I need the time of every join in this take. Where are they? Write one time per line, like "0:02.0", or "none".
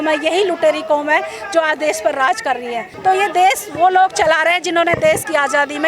0:02.9